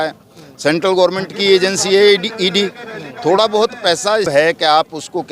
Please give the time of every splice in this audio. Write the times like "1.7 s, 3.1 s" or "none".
4.3 s